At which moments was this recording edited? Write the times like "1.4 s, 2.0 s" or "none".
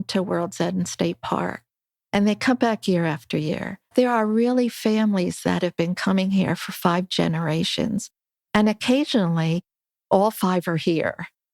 3.9 s